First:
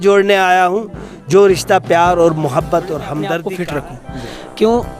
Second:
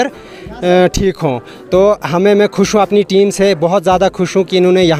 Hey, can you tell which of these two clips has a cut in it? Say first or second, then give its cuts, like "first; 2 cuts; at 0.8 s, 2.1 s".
first; 1 cut; at 3.5 s